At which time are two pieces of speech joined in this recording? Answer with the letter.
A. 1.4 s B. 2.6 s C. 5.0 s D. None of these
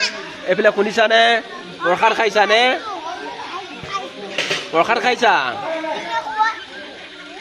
D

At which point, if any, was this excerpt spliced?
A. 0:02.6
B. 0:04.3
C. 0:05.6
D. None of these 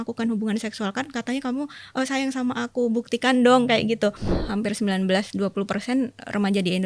B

